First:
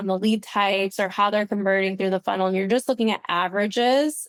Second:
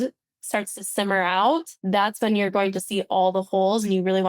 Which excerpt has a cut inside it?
second; 1 cut; at 1.7 s

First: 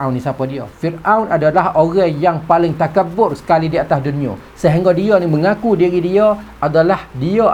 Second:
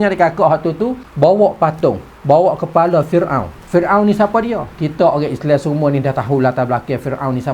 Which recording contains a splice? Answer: second; 1 cut; at 1.0 s

